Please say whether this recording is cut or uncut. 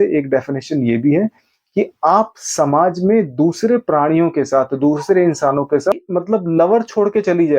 cut